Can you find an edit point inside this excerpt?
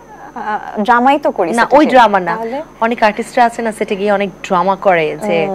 no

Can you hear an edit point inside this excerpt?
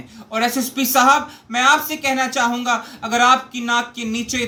no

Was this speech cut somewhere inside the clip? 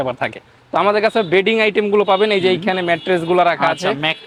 no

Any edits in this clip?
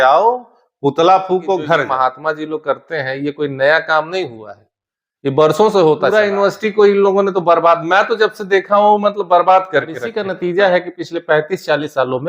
yes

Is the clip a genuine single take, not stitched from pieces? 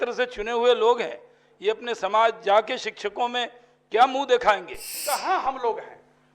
no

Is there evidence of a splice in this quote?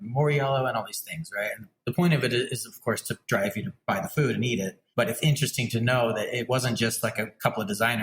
yes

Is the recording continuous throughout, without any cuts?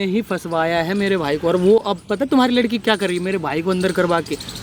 yes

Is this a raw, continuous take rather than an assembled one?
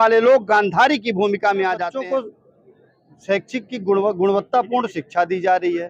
no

